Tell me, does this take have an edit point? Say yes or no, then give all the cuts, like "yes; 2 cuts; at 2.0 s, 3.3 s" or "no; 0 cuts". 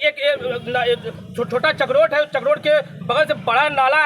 no; 0 cuts